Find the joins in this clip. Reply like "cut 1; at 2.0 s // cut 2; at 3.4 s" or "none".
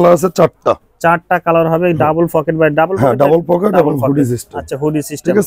none